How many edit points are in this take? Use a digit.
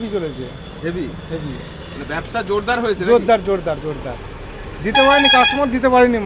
0